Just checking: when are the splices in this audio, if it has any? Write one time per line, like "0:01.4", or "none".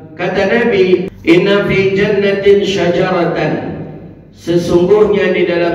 0:01.1

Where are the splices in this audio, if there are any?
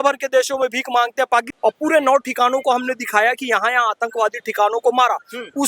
0:01.5

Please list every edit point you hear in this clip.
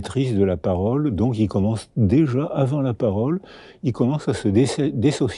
none

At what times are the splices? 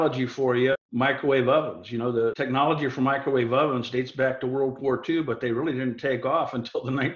0:00.8
0:02.4

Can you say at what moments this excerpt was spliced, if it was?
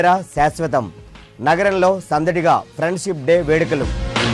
none

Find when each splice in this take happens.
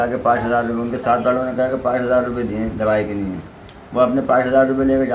none

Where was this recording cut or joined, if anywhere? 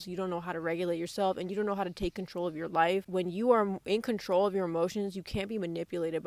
none

